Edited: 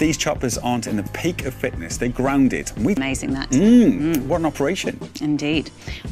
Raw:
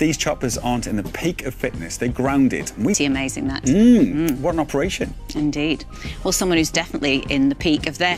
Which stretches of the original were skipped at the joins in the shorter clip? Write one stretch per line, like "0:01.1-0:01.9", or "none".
0:03.0-0:03.1